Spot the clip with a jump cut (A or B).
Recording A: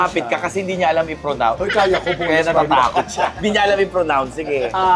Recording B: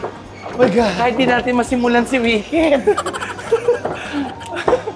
A